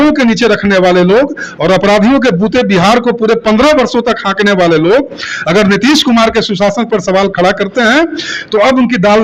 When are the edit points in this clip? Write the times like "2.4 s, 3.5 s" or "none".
none